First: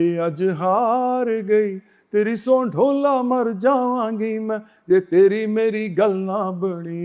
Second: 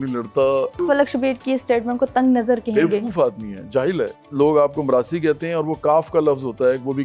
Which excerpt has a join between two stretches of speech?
second; 2 cuts; at 0.8 s, 4.3 s

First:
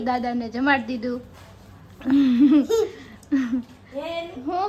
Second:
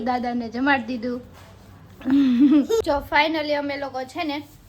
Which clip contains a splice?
second; 1 cut; at 2.8 s

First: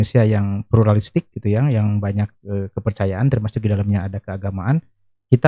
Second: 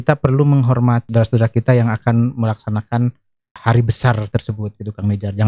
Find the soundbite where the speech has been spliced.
second; 2 cuts; at 1.1 s, 3.5 s

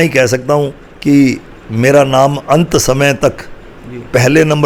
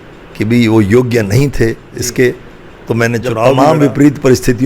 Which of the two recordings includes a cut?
second; 1 cut; at 3.6 s

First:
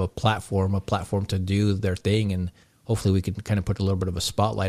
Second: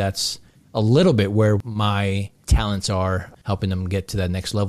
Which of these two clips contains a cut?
second; 2 cuts; at 1.6 s, 3.3 s

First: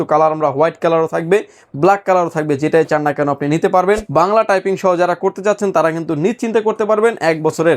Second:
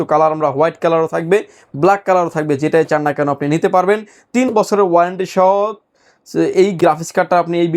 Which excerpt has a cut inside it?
first; 1 cut; at 4.1 s

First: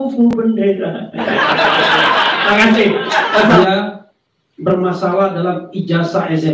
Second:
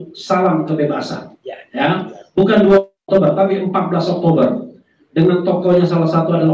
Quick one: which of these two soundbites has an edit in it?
first; 1 cut; at 3.6 s

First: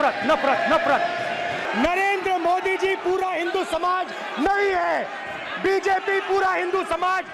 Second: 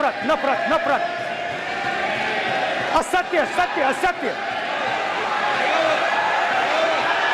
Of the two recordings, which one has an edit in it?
first; 1 cut; at 1.6 s

